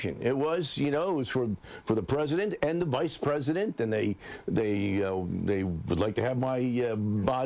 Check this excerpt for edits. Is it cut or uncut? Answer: uncut